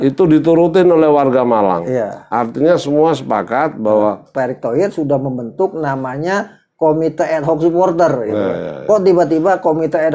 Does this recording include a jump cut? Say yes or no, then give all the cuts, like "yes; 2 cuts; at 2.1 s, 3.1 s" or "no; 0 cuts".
yes; 1 cut; at 4.3 s